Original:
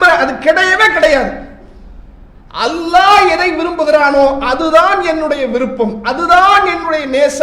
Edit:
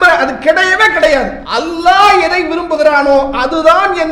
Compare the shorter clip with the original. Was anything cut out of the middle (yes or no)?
yes